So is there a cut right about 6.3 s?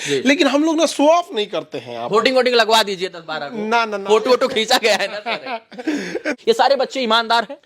yes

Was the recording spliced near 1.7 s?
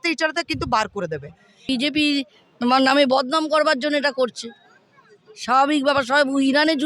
yes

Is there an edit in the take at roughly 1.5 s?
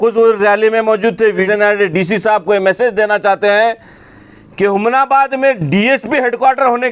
yes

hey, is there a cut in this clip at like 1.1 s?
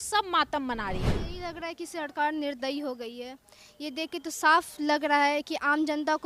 yes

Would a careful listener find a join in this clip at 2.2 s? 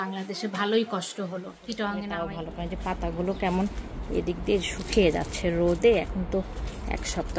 yes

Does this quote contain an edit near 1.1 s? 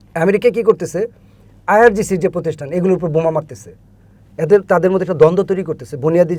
no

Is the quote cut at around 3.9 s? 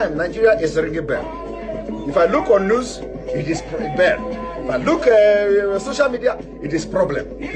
yes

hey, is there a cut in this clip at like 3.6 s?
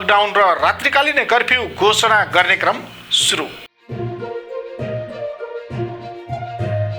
yes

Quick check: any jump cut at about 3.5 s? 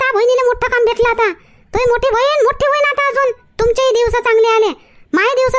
yes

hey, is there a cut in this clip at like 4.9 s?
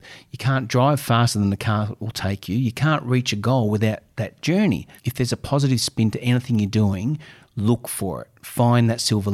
yes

